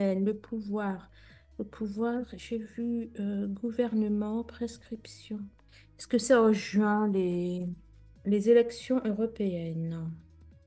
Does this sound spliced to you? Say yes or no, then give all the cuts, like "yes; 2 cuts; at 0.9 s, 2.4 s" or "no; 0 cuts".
yes; 2 cuts; at 5.7 s, 8.2 s